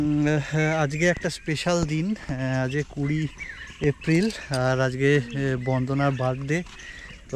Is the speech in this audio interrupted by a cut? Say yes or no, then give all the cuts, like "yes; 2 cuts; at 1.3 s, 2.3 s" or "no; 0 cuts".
no; 0 cuts